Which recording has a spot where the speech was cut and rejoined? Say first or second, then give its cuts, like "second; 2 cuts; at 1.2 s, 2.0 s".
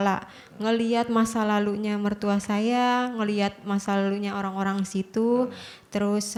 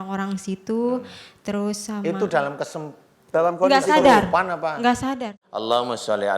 second; 1 cut; at 5.2 s